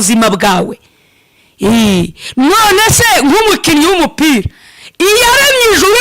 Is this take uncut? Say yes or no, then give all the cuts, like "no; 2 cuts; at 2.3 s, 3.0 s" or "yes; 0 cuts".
yes; 0 cuts